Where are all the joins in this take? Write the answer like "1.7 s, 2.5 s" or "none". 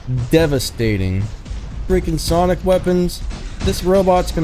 1.8 s